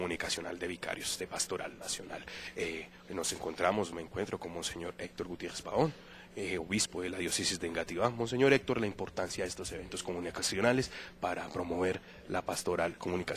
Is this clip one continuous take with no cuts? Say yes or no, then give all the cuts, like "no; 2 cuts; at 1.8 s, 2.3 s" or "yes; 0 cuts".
no; 1 cut; at 8.7 s